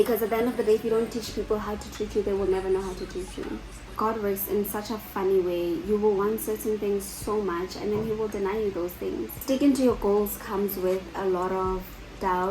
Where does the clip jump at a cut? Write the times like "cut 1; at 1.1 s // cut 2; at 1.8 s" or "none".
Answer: cut 1; at 3.8 s // cut 2; at 9.4 s

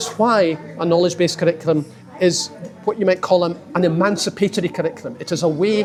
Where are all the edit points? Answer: none

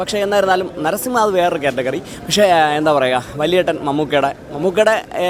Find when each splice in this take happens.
none

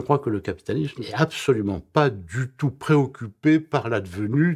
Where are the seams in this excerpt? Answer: cut 1; at 0.9 s

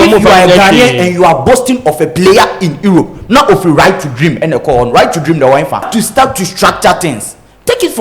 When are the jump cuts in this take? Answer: cut 1; at 5.9 s

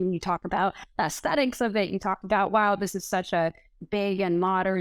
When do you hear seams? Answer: none

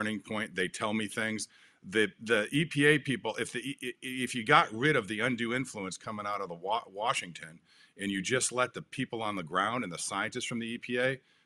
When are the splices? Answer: none

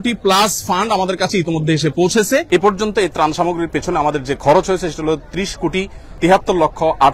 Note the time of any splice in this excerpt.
cut 1; at 2.5 s

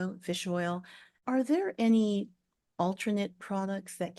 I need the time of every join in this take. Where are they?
cut 1; at 1.2 s

